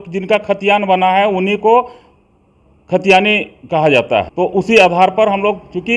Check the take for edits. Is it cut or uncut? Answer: cut